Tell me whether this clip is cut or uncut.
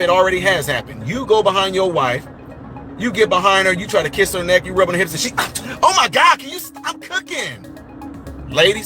uncut